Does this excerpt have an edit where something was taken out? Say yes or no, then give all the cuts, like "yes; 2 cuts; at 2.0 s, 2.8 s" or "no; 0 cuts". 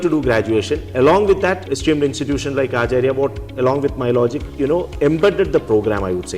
yes; 2 cuts; at 1.6 s, 4.4 s